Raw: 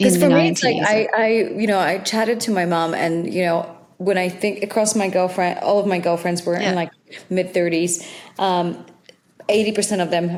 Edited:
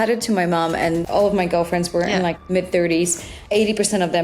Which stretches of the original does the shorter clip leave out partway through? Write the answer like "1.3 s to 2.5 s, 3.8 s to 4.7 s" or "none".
3.3 s to 5.6 s, 6.9 s to 7.2 s, 8.1 s to 9.3 s